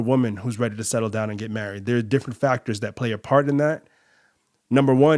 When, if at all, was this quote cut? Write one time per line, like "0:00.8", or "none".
none